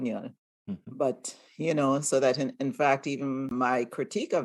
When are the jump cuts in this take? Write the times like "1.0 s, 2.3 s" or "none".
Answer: 3.5 s